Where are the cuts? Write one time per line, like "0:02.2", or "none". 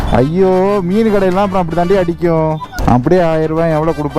0:02.7